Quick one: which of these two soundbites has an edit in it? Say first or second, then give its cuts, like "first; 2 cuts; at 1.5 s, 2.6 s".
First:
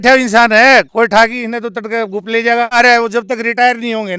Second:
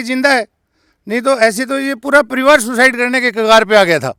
first; 1 cut; at 2.8 s